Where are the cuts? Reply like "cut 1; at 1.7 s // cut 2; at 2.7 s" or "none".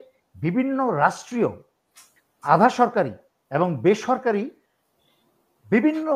none